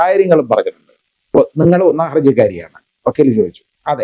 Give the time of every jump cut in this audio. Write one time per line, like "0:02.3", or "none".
0:01.2